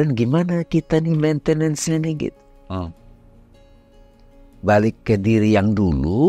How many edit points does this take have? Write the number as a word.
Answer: zero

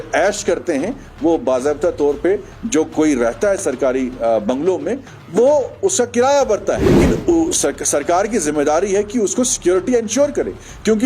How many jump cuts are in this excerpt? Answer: one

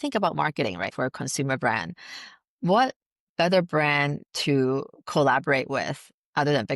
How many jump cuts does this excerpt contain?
one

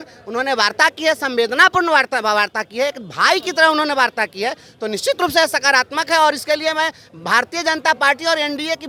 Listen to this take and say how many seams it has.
zero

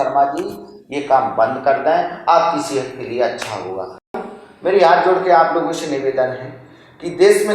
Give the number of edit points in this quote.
one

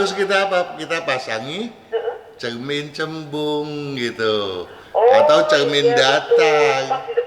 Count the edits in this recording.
zero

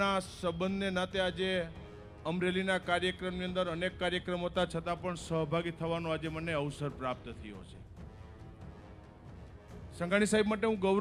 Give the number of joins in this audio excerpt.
zero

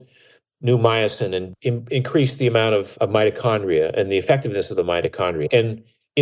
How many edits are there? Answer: three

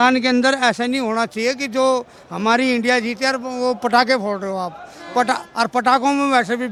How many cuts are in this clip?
zero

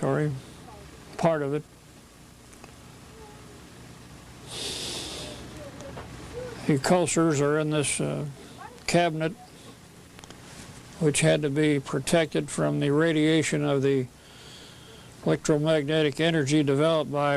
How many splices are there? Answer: one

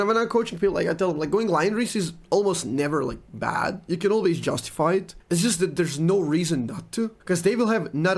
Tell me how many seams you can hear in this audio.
two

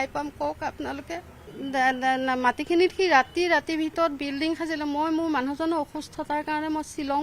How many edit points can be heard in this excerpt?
one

